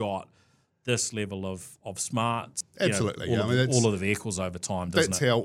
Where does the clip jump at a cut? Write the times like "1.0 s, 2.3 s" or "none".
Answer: 2.6 s